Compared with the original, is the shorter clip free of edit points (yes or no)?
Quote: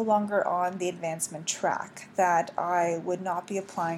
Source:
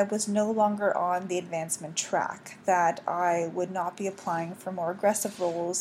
yes